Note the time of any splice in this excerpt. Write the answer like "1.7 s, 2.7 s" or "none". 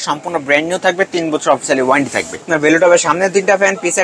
2.5 s